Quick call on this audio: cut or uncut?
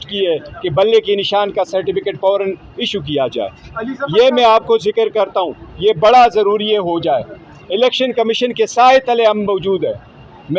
uncut